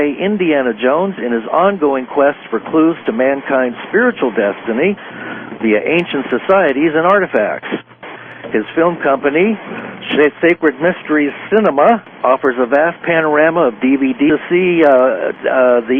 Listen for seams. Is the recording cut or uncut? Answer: uncut